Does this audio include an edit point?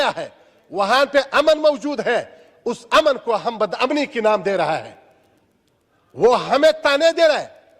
no; 0 cuts

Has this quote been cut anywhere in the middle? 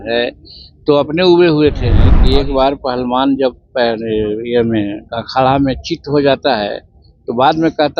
yes; 1 cut; at 2.1 s

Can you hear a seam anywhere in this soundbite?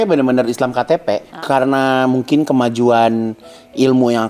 yes; 1 cut; at 1.3 s

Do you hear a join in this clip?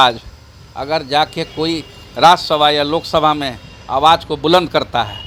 no; 0 cuts

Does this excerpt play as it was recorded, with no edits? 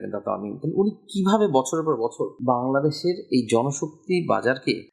yes; 0 cuts

